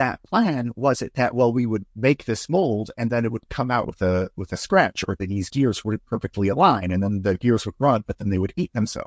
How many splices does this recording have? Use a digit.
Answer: 0